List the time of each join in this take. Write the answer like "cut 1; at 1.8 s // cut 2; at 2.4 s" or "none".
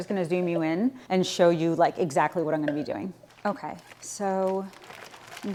none